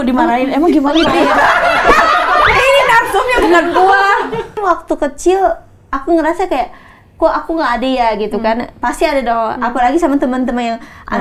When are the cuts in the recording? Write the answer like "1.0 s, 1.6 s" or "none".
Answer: 4.5 s